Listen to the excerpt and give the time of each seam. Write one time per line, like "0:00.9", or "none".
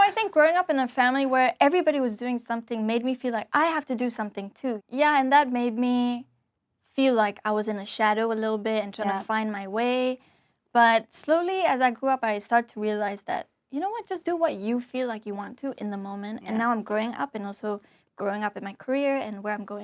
0:04.8
0:16.4